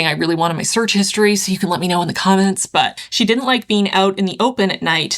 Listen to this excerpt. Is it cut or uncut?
cut